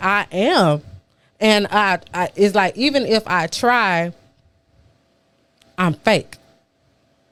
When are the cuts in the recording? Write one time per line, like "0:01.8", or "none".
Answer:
none